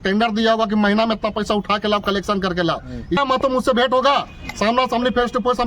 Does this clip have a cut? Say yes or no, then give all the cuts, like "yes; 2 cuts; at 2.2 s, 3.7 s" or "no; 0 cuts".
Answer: yes; 1 cut; at 3.2 s